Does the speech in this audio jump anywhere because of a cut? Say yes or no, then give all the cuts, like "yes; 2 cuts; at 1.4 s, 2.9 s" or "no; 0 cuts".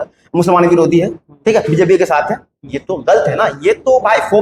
no; 0 cuts